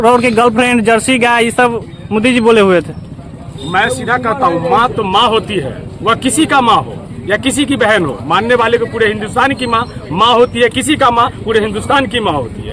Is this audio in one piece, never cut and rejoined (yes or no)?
yes